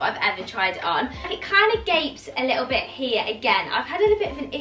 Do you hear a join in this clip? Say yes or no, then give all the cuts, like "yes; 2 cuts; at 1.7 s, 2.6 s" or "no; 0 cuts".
no; 0 cuts